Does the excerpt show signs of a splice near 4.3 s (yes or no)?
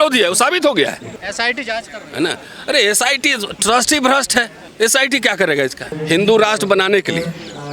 no